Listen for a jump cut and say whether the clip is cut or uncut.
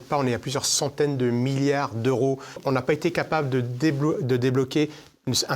cut